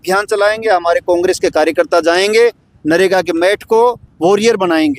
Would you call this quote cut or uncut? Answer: cut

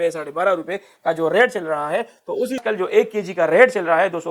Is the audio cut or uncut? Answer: cut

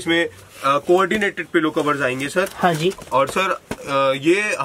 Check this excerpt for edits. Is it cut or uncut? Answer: uncut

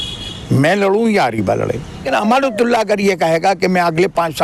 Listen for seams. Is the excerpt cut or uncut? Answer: cut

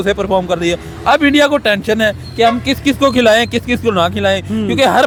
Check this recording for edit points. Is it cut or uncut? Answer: uncut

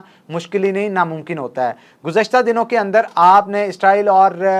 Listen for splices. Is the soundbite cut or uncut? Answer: uncut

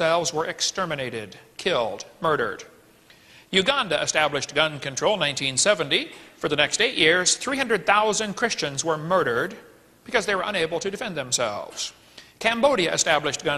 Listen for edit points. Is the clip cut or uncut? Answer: cut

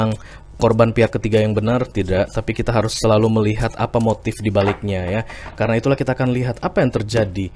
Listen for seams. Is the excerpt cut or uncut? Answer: uncut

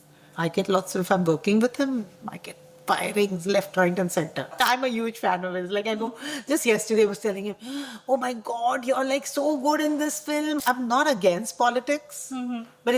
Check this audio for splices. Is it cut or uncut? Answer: cut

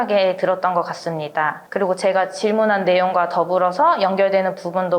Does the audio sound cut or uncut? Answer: cut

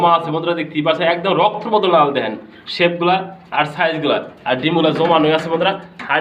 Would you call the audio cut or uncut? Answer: uncut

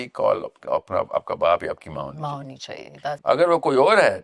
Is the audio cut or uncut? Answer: cut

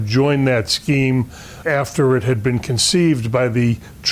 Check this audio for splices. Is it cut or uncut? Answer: uncut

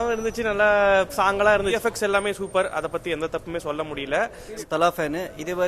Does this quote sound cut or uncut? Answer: cut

